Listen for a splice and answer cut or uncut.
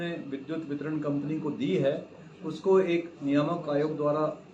uncut